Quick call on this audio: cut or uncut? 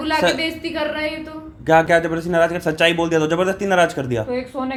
uncut